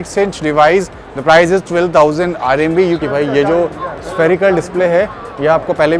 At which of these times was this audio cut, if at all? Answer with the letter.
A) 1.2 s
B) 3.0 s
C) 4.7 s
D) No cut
B